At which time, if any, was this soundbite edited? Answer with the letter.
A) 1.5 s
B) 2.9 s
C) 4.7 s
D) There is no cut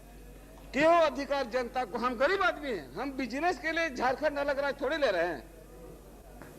D